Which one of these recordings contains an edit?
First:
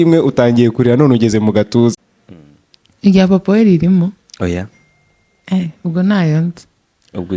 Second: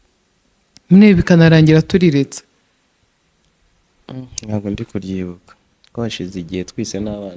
first; 1 cut; at 2.0 s

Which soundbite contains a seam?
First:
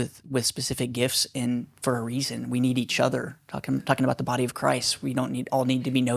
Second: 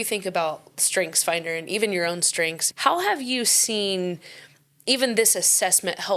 second; 1 cut; at 2.6 s

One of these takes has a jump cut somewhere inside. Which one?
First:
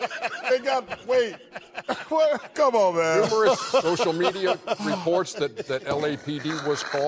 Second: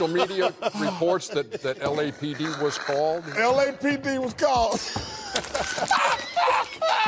first; 1 cut; at 2.5 s

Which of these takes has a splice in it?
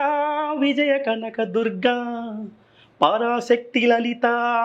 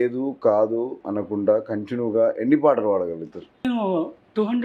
second; 2 cuts; at 1.0 s, 3.6 s

